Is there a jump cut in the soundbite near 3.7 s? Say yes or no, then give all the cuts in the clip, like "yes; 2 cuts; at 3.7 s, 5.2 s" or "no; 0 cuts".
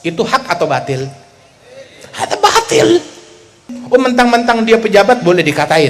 yes; 1 cut; at 3.7 s